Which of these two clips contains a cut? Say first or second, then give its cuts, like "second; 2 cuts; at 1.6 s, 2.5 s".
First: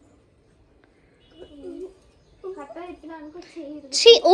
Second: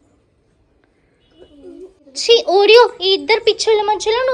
second; 1 cut; at 2.1 s